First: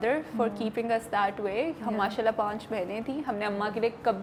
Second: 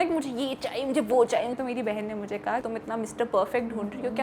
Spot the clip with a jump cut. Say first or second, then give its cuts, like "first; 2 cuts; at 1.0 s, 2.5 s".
second; 2 cuts; at 1.6 s, 2.7 s